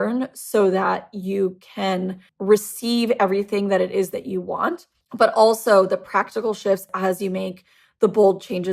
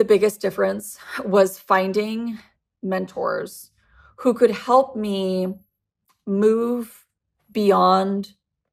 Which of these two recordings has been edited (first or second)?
first